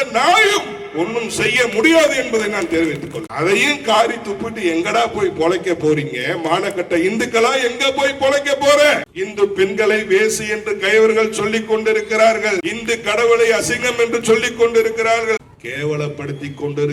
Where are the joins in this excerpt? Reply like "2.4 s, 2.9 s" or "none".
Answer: 3.3 s, 9.2 s, 15.4 s